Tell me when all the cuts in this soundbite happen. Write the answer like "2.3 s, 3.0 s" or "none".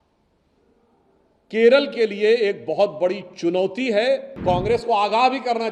4.3 s